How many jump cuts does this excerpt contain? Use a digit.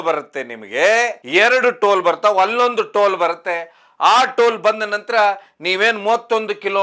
1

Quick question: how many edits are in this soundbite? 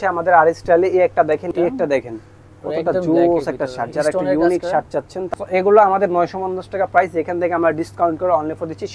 2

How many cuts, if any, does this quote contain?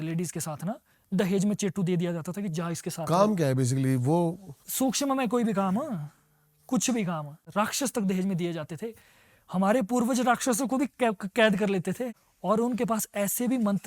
2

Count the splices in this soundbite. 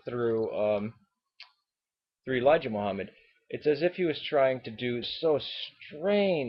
0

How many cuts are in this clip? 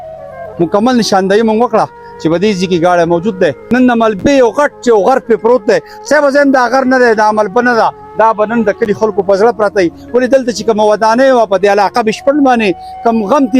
1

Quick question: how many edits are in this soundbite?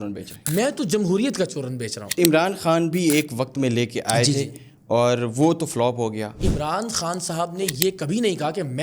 2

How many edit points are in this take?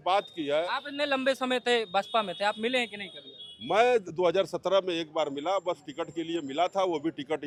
0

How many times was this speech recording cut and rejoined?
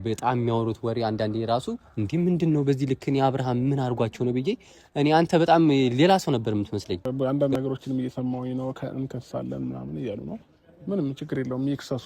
1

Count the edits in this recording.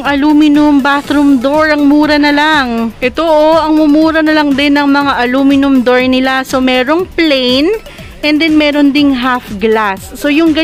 0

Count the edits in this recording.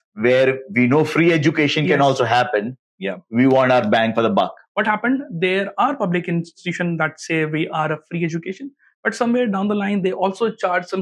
1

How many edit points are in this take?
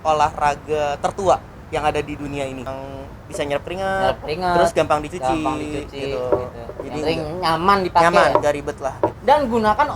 2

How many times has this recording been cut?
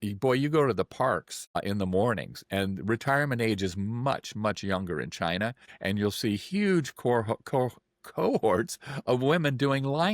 2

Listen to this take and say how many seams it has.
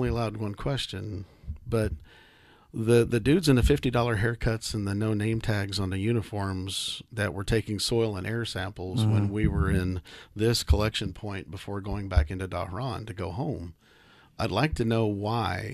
0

